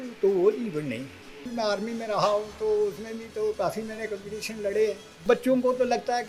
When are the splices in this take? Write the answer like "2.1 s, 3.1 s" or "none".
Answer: 1.5 s, 5.2 s